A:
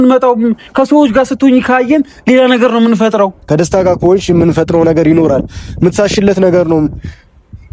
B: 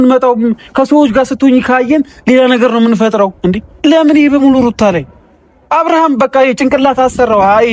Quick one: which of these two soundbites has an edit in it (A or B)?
A